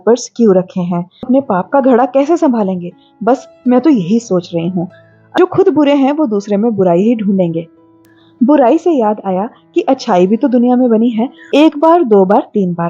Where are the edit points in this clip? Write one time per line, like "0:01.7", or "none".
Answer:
0:01.3
0:05.2
0:11.4